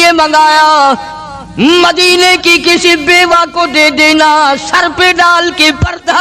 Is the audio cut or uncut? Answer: uncut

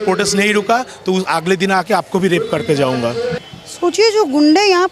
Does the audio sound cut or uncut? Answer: cut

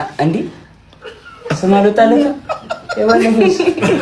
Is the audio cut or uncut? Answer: uncut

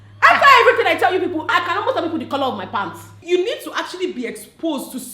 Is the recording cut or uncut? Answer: cut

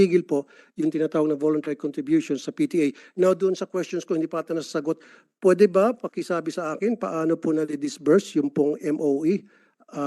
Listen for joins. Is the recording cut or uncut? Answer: uncut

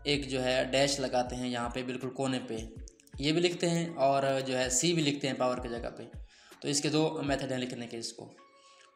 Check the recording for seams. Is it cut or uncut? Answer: uncut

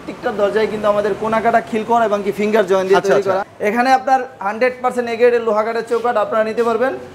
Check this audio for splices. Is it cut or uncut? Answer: cut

